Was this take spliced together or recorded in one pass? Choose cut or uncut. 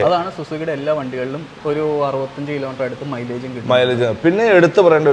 cut